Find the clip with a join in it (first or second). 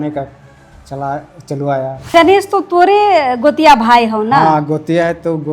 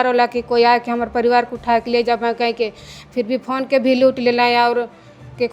first